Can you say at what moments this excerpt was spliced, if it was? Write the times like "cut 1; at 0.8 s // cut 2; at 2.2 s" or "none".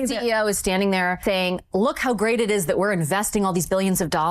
cut 1; at 1.2 s